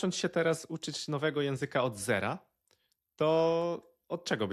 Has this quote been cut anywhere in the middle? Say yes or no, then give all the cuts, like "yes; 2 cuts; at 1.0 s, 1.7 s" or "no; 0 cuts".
no; 0 cuts